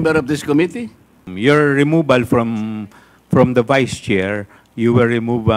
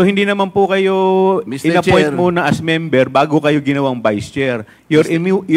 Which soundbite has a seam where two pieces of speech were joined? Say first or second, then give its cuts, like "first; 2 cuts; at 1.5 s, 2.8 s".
first; 1 cut; at 1.2 s